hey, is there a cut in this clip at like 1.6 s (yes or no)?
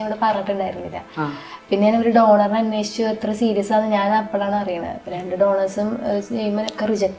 no